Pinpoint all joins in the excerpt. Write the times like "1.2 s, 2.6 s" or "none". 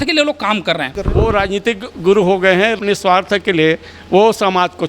1.0 s, 2.8 s